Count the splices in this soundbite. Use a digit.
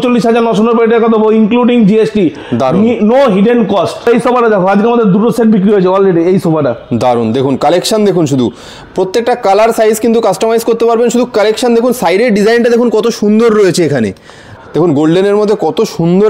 2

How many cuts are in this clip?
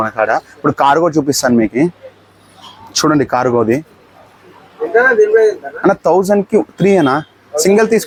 0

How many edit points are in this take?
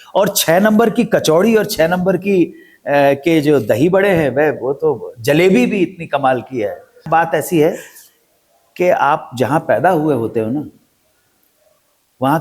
1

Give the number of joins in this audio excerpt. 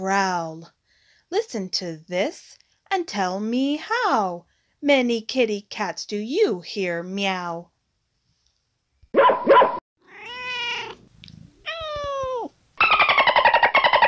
1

